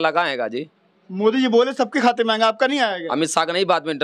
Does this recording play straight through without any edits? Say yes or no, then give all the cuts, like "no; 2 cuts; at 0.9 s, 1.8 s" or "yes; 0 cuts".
yes; 0 cuts